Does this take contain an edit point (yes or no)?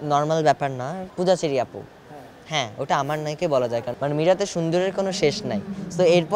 yes